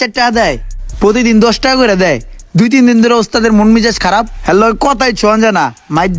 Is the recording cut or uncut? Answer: uncut